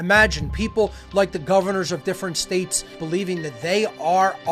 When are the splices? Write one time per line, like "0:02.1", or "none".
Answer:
none

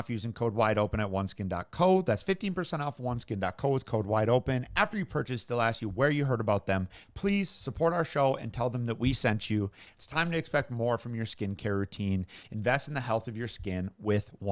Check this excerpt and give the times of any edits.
none

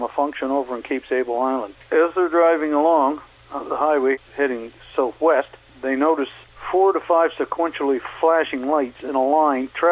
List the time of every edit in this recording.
0:01.7
0:03.3
0:04.2
0:05.6
0:06.3

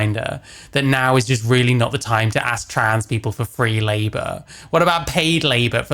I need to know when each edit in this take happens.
none

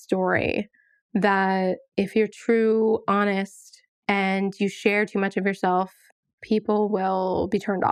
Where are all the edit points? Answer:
none

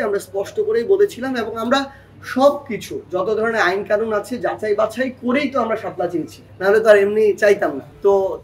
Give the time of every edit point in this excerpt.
none

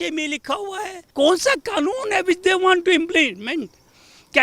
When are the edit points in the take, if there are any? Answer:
0:01.1

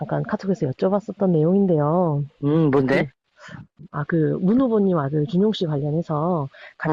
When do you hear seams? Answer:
0:05.3

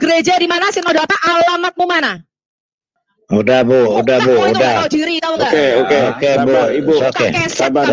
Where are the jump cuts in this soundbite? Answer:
0:02.9

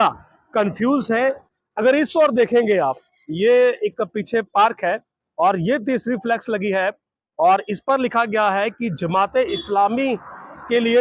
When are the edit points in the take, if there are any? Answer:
0:01.5

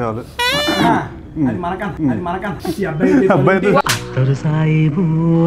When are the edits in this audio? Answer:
0:02.5

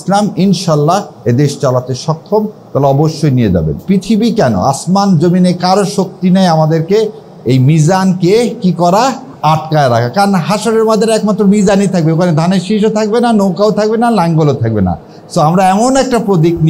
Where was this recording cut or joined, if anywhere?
0:03.8

